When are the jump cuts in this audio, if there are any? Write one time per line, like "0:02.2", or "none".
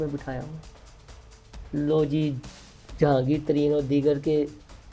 none